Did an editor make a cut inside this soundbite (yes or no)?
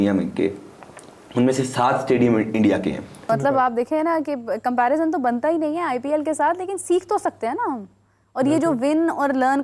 yes